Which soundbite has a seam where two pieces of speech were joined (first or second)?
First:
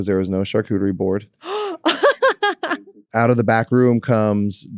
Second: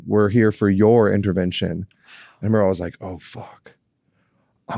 first